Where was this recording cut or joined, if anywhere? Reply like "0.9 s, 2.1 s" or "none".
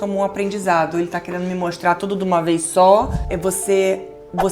3.2 s